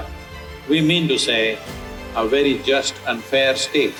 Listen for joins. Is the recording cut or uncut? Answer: uncut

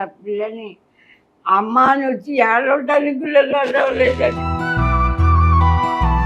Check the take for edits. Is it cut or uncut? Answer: uncut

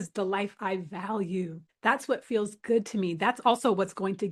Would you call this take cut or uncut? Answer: uncut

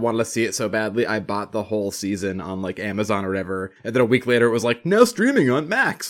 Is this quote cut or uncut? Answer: cut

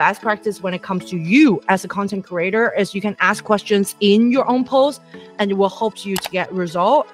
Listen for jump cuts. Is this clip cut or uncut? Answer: uncut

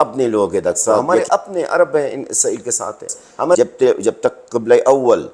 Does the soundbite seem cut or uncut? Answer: cut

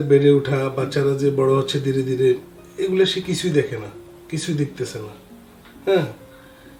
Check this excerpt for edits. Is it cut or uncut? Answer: uncut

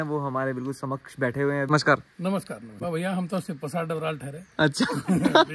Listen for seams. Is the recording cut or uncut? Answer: cut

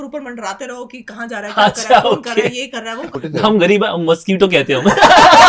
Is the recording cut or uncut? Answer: cut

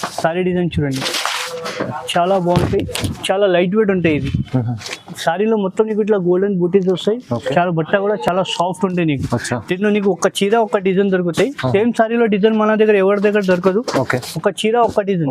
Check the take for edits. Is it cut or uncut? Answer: uncut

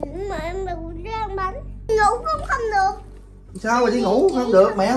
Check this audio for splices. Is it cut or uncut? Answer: cut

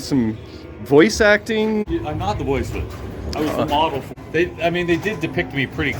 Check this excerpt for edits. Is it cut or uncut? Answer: cut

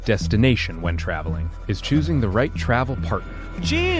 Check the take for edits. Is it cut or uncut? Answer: cut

